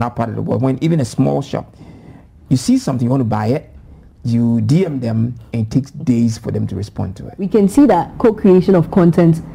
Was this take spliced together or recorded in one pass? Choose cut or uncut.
cut